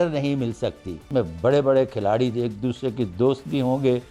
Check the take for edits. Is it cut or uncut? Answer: cut